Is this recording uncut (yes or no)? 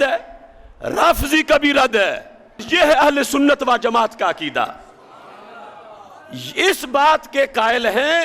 no